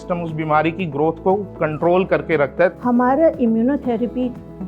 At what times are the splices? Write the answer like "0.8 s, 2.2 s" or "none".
2.8 s